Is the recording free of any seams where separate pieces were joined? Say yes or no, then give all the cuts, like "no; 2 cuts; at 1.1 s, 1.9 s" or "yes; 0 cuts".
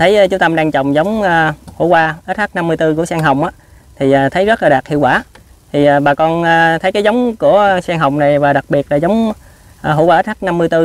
yes; 0 cuts